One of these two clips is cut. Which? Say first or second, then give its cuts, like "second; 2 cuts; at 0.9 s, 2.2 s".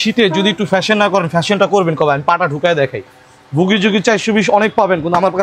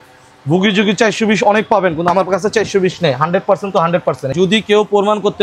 second; 1 cut; at 4.3 s